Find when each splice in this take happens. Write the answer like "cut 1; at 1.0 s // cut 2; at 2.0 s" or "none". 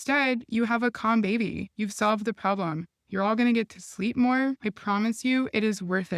cut 1; at 1.6 s // cut 2; at 3.0 s // cut 3; at 4.7 s